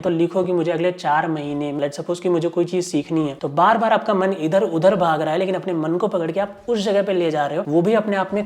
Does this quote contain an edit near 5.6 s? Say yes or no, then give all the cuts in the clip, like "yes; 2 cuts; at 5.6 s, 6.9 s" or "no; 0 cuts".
no; 1 cut; at 1.8 s